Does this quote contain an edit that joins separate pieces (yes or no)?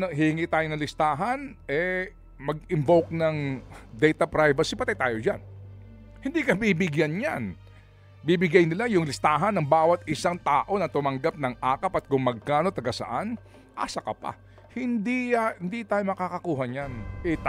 no